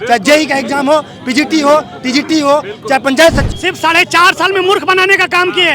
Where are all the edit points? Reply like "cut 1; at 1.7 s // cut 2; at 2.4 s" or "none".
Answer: cut 1; at 3.5 s